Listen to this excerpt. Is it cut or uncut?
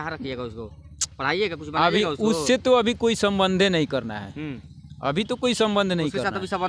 uncut